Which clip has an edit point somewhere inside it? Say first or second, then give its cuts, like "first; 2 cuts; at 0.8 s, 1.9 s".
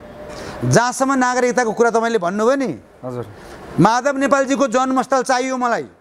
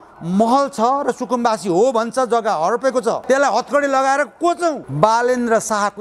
second; 2 cuts; at 3.2 s, 4.9 s